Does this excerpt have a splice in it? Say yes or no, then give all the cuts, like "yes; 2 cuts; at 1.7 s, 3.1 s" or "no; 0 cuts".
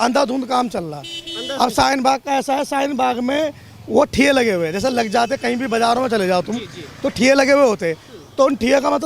no; 0 cuts